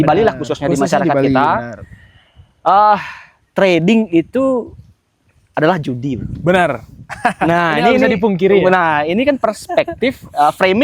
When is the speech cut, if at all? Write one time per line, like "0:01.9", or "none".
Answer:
none